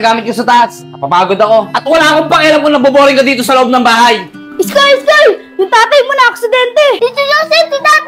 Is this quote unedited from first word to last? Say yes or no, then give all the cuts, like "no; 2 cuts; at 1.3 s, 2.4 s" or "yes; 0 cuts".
no; 3 cuts; at 1.7 s, 4.4 s, 7.0 s